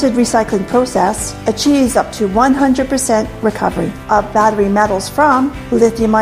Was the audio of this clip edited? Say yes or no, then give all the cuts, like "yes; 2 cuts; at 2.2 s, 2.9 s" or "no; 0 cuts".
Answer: no; 0 cuts